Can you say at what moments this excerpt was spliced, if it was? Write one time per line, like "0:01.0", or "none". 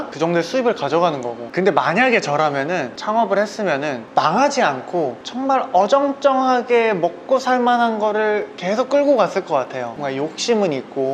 0:01.4